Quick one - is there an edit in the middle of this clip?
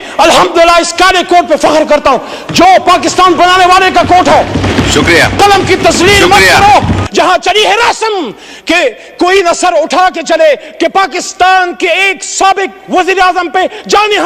yes; 2 cuts; at 7.0 s, 10.7 s

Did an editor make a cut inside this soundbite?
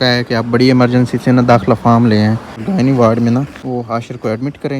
yes; 2 cuts; at 2.6 s, 3.6 s

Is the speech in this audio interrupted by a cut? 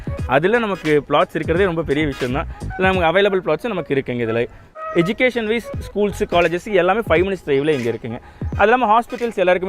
yes; 1 cut; at 4.7 s

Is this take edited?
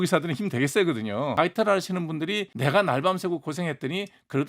yes; 2 cuts; at 1.3 s, 2.5 s

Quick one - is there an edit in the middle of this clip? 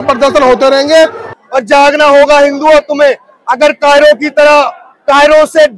yes; 1 cut; at 1.3 s

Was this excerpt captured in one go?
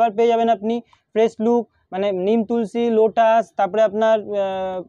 yes; 0 cuts

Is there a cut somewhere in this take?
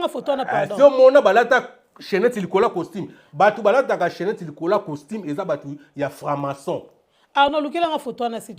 no; 0 cuts

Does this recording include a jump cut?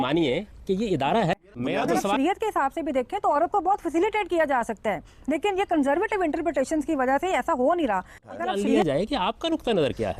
yes; 2 cuts; at 1.7 s, 8.4 s

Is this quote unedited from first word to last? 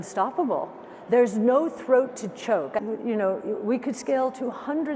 no; 1 cut; at 2.8 s

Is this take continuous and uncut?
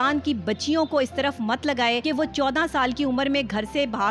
no; 1 cut; at 2.0 s

